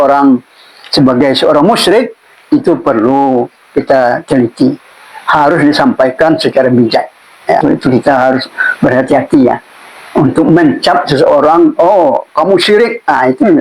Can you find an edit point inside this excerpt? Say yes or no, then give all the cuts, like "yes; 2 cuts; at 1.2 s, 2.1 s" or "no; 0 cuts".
yes; 1 cut; at 7.6 s